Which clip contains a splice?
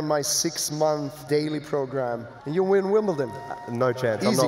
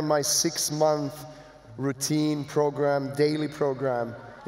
first; 2 cuts; at 1.2 s, 2.3 s

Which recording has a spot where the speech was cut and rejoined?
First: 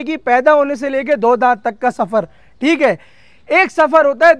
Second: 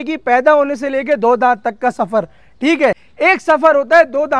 second; 1 cut; at 3.1 s

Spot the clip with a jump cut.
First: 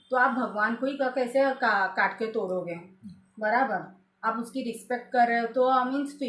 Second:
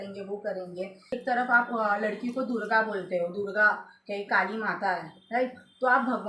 second; 1 cut; at 1.1 s

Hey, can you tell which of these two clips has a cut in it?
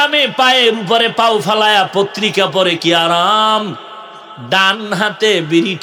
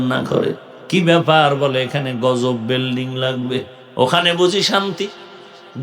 second; 1 cut; at 3.8 s

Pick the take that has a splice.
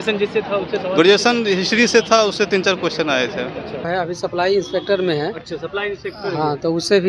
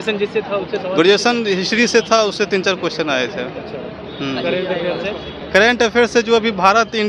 first; 1 cut; at 3.8 s

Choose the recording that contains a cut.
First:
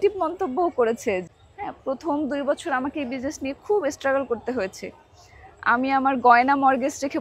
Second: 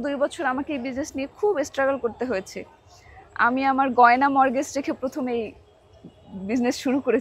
first; 1 cut; at 1.2 s

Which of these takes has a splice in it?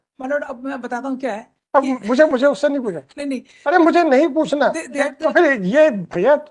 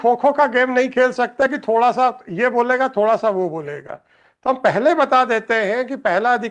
first; 1 cut; at 5.1 s

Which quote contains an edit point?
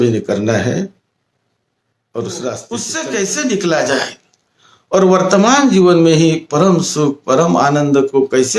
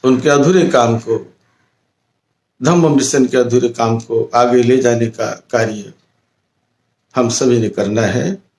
first; 1 cut; at 2.9 s

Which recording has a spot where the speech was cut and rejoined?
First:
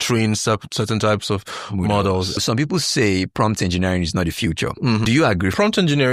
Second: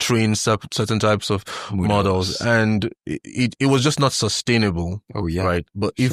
first; 2 cuts; at 2.4 s, 5.3 s

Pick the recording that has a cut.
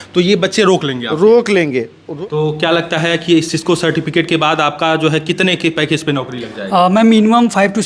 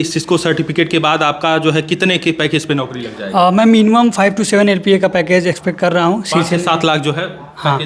first; 1 cut; at 2.1 s

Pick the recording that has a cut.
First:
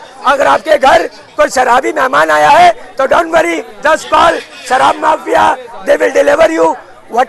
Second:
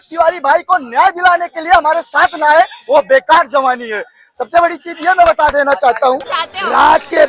second; 1 cut; at 6.4 s

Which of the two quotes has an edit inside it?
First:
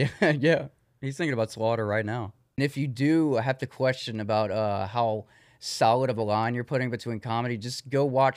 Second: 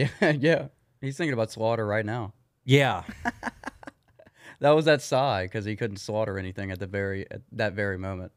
first; 1 cut; at 2.6 s

